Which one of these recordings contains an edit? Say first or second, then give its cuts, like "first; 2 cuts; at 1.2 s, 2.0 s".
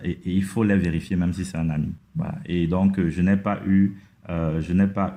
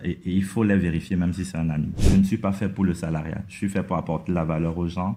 second; 1 cut; at 2.0 s